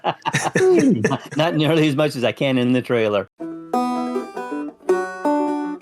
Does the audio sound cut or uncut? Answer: cut